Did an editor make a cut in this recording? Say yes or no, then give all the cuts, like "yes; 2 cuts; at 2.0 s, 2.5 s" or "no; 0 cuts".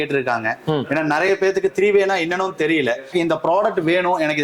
yes; 1 cut; at 3.1 s